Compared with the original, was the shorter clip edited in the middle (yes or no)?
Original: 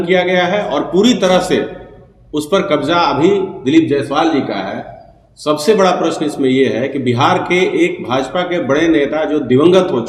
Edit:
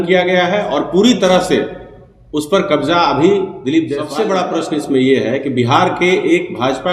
yes